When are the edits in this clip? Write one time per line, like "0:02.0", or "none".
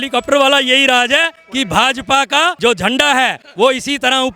0:01.4
0:02.6
0:03.4